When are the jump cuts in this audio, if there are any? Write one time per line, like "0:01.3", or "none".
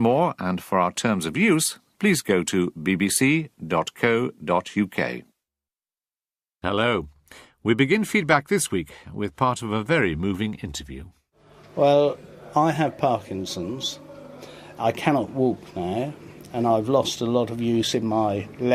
none